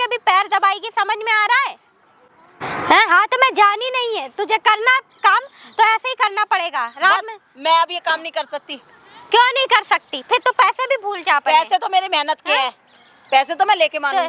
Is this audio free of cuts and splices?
yes; 0 cuts

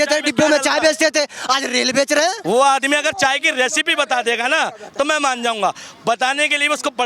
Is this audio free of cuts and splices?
no; 1 cut; at 2.4 s

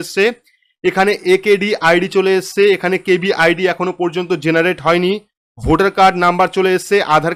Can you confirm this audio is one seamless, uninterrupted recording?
yes; 0 cuts

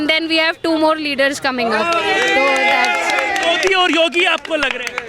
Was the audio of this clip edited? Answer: no; 0 cuts

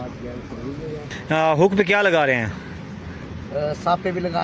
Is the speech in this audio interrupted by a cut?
yes; 1 cut; at 1.0 s

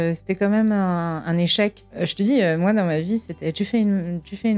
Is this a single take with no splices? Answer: yes; 0 cuts

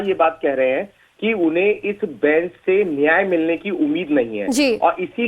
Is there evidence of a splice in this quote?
no; 0 cuts

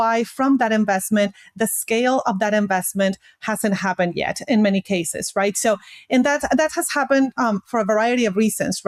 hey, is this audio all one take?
yes; 0 cuts

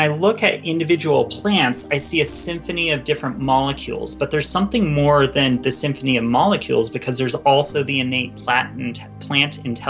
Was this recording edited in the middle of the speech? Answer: no; 0 cuts

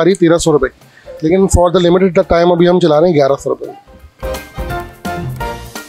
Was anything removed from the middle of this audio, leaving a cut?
yes; 1 cut; at 4.5 s

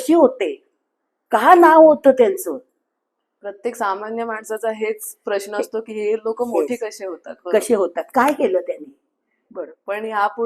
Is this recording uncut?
no; 1 cut; at 9.4 s

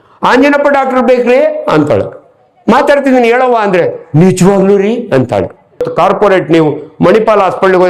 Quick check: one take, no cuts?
no; 1 cut; at 5.9 s

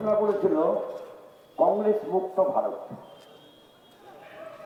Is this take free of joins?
yes; 0 cuts

